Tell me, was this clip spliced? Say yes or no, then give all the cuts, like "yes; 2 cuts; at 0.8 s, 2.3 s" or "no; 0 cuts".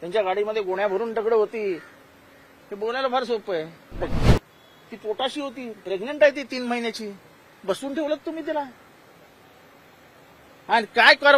yes; 1 cut; at 4.1 s